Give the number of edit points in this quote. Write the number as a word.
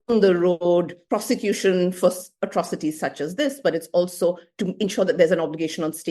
one